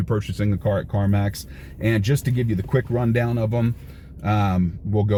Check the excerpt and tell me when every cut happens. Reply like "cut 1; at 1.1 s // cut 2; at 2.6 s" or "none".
none